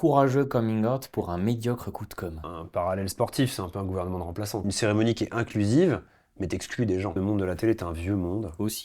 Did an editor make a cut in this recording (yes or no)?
yes